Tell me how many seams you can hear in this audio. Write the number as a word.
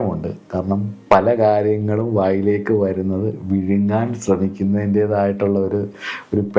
one